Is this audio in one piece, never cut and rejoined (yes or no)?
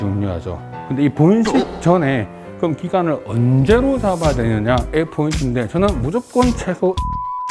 yes